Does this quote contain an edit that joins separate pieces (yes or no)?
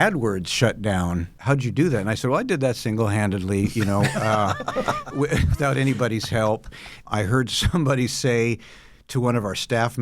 yes